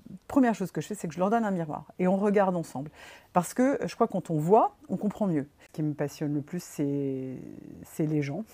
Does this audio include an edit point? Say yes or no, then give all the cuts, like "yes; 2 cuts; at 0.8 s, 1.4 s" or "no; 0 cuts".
yes; 1 cut; at 5.7 s